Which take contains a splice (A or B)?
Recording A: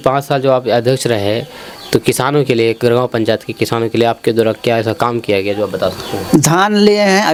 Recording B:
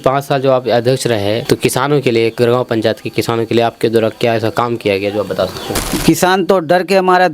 B